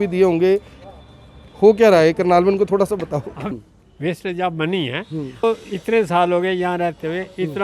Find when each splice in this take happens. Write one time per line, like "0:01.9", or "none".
0:03.4
0:05.4